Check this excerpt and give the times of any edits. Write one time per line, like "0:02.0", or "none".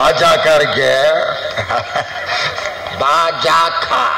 none